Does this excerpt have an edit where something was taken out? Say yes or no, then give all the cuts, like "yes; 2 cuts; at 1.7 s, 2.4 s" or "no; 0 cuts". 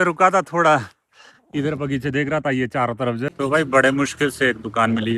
yes; 1 cut; at 3.3 s